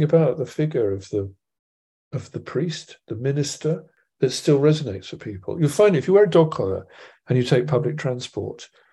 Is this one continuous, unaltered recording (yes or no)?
no